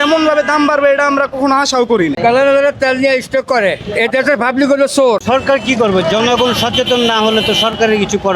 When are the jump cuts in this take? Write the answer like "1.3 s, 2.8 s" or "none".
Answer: 2.2 s, 5.2 s

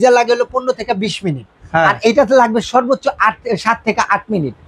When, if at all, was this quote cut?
none

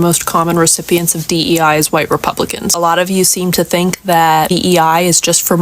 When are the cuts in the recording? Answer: 2.7 s

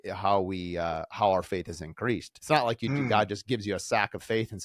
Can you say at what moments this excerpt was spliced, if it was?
2.3 s

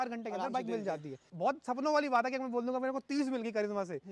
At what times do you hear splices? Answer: 1.2 s

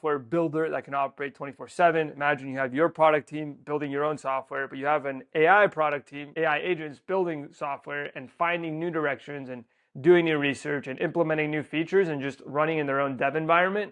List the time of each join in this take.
6.2 s

